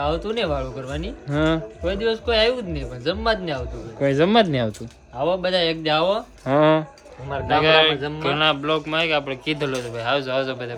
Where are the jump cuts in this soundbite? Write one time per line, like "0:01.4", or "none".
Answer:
none